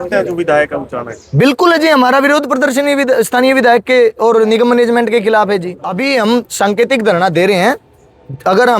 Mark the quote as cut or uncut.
cut